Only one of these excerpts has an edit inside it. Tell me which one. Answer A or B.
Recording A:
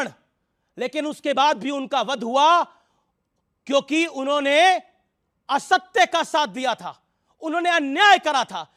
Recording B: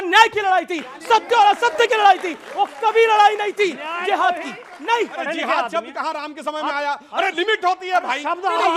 B